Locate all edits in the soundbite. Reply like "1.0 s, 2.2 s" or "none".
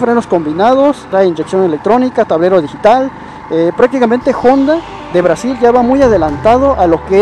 1.1 s